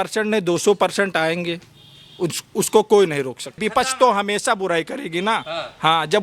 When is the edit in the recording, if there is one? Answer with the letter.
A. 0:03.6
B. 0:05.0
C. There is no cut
A